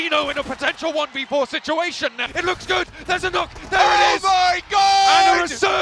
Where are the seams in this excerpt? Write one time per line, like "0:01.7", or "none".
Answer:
0:02.2